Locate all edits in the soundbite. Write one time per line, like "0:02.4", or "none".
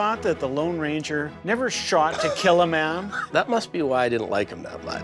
0:03.2